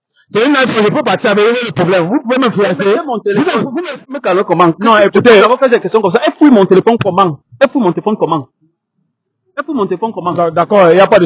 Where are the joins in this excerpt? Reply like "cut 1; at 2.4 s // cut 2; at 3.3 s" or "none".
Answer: cut 1; at 4.0 s